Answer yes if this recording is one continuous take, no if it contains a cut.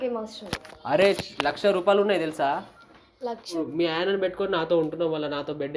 no